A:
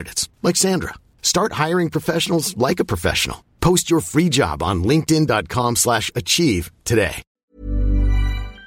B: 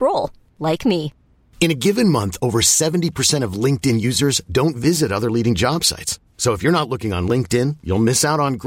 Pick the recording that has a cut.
A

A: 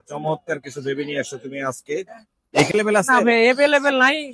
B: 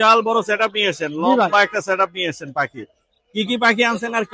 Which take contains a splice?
A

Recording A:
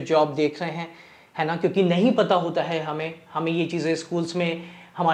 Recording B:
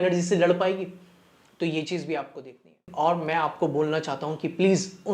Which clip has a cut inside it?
B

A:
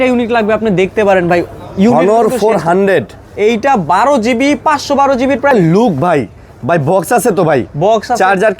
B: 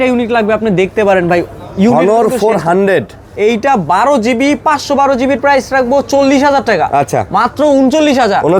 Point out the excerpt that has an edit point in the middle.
A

